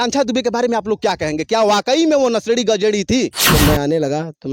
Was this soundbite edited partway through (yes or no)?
yes